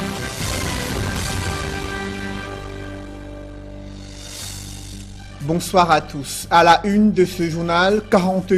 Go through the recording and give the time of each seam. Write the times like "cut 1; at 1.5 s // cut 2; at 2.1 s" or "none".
cut 1; at 4.0 s